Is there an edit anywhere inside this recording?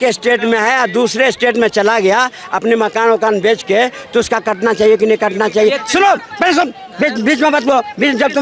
no; 0 cuts

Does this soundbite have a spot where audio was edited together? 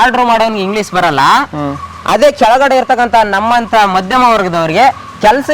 no; 0 cuts

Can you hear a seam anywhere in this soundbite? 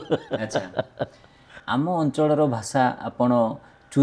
yes; 1 cut; at 1.5 s

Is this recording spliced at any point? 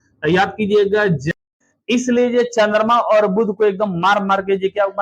yes; 1 cut; at 1.5 s

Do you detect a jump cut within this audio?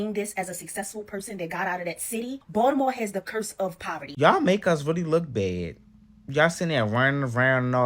yes; 2 cuts; at 2.4 s, 4.1 s

